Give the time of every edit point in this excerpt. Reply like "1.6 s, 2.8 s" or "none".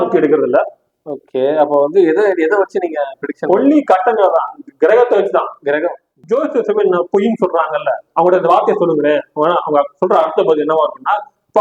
6.1 s